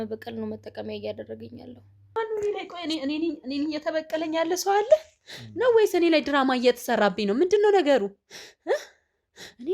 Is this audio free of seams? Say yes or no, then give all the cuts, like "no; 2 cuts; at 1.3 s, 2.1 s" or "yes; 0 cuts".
no; 1 cut; at 2.2 s